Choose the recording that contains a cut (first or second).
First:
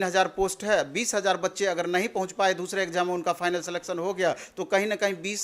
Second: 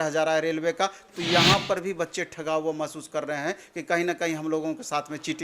second